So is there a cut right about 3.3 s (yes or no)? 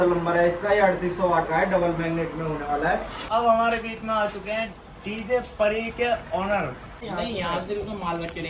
yes